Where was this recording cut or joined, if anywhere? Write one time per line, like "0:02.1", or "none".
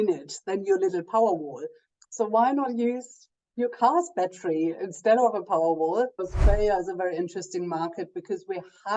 0:06.2